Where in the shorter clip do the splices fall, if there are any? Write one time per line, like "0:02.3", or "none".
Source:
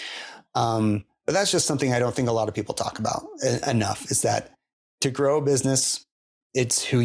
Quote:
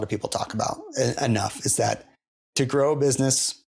none